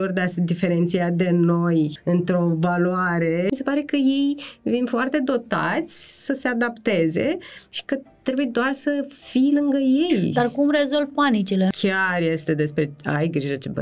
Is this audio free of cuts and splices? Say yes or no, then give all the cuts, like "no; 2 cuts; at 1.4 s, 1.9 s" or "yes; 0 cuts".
no; 3 cuts; at 2.0 s, 3.5 s, 11.7 s